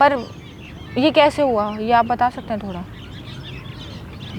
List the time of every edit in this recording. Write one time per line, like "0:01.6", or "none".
none